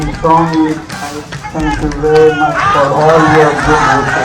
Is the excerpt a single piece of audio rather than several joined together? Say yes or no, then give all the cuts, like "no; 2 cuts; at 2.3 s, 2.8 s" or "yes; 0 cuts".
yes; 0 cuts